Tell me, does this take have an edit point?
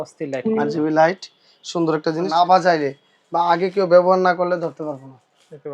yes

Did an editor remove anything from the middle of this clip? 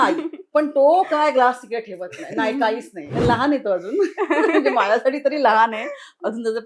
yes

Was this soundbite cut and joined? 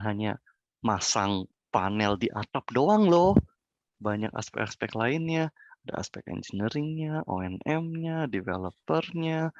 no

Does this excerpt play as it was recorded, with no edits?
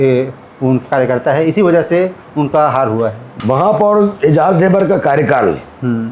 no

